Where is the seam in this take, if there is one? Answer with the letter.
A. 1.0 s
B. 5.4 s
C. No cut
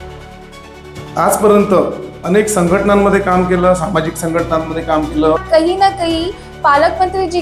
B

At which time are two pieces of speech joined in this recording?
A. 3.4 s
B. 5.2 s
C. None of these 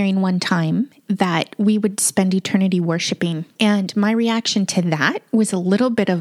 A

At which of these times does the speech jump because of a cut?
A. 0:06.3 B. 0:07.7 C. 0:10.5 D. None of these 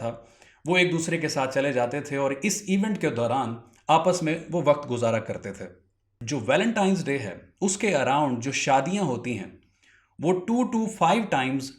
A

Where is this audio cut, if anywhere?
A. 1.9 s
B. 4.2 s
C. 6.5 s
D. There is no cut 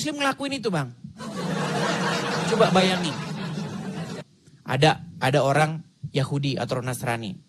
B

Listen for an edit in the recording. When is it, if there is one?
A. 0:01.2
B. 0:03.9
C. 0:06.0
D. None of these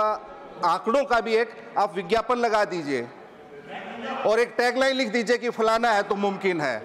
D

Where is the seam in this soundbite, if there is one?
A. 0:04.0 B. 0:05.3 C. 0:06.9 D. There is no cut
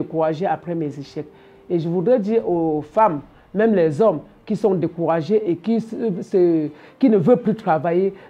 D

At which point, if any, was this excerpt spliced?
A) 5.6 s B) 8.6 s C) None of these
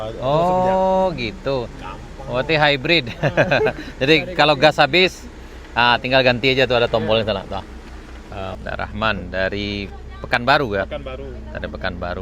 B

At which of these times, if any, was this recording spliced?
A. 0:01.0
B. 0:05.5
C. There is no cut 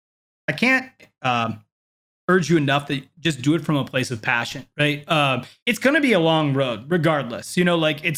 B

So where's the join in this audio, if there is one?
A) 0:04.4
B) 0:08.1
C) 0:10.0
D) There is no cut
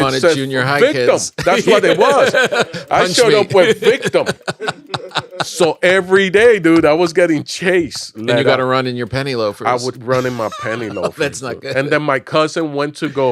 B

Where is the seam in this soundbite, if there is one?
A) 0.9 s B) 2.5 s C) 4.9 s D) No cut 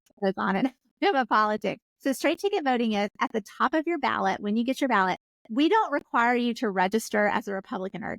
C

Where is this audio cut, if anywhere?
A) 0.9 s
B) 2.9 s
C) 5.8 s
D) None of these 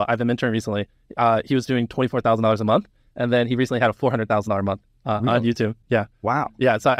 D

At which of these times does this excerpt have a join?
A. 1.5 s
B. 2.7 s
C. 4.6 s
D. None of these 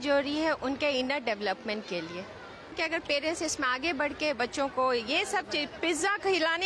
B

